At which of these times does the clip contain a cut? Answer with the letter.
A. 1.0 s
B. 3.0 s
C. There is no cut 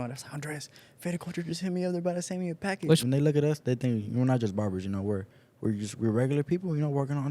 B